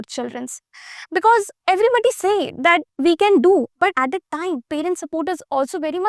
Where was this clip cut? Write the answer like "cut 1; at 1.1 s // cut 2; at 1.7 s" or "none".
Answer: cut 1; at 1.5 s // cut 2; at 2.9 s // cut 3; at 4.0 s